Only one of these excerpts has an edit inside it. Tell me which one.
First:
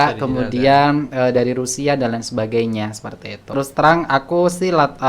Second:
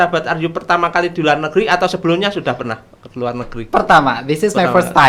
first; 1 cut; at 3.5 s

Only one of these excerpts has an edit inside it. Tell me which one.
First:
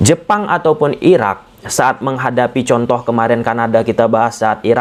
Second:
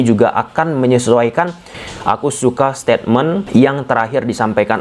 second; 2 cuts; at 1.8 s, 3.4 s

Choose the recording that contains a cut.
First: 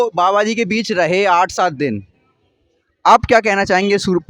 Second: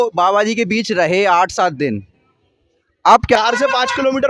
second; 1 cut; at 3.4 s

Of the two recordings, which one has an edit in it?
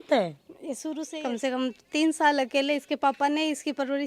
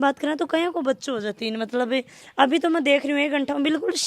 first; 1 cut; at 1.0 s

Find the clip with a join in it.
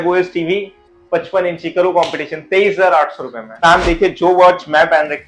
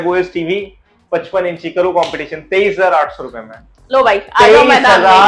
first; 1 cut; at 3.6 s

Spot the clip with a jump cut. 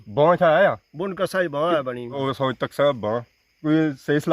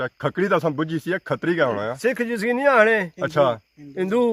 first; 1 cut; at 2.2 s

